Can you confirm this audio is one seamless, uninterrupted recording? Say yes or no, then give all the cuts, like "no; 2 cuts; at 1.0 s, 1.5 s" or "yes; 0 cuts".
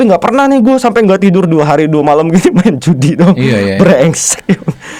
yes; 0 cuts